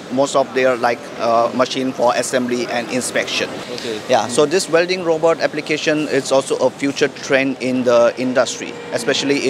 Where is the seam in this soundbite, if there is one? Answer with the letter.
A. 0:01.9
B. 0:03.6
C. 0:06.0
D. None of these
B